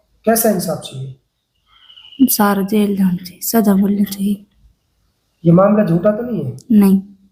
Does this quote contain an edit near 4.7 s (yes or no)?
no